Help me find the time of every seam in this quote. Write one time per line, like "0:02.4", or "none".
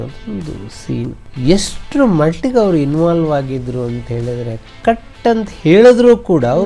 0:01.2